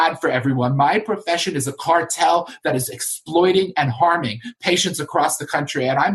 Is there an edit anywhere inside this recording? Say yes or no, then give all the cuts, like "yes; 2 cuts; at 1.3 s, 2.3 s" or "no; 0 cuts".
no; 0 cuts